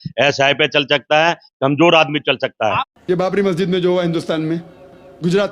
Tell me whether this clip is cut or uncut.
cut